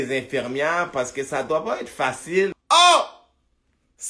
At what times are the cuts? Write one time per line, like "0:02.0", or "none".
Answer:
0:02.6